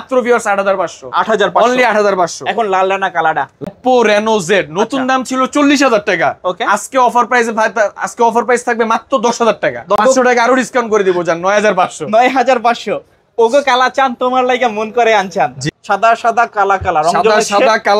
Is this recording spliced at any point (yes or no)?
yes